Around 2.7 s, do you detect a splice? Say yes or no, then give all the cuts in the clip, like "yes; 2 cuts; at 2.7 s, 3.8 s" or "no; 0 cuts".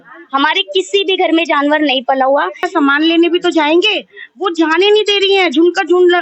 yes; 1 cut; at 2.7 s